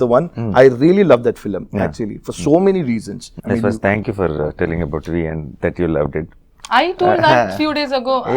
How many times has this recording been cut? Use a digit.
1